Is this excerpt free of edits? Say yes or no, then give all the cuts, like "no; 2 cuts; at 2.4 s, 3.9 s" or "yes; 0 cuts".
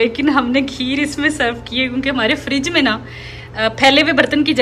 yes; 0 cuts